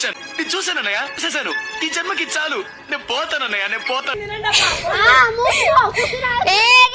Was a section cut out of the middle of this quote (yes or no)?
yes